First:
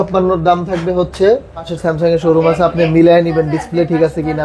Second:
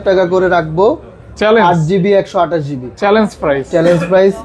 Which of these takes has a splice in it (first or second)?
first